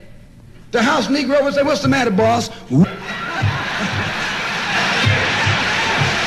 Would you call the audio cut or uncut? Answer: uncut